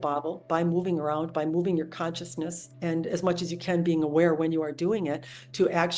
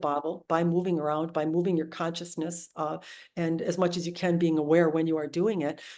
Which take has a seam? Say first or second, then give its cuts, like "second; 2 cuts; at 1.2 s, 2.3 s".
first; 1 cut; at 2.6 s